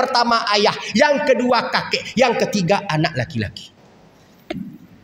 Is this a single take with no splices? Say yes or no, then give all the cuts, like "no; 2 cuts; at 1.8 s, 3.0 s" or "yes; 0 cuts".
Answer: yes; 0 cuts